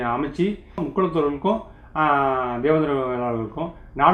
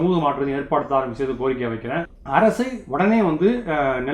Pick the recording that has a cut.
second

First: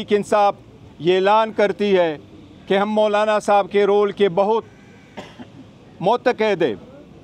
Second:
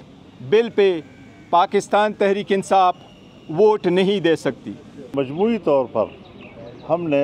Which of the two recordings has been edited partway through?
second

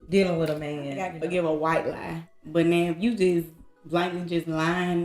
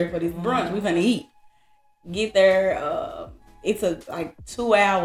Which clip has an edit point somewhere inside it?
first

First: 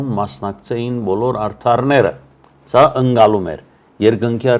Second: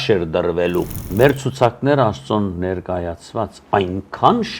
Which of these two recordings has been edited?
second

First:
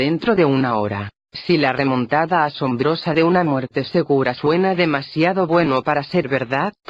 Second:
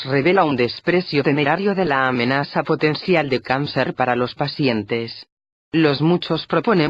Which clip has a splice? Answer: second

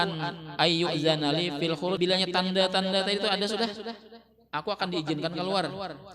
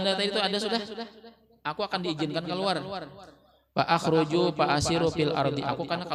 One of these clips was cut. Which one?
first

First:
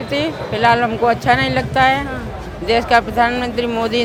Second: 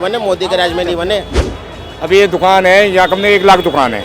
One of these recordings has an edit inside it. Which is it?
second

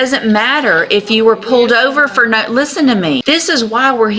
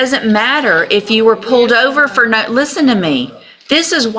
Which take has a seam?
first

